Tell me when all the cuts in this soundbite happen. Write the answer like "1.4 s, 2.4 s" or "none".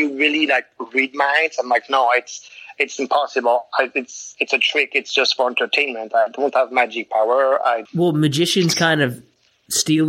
7.8 s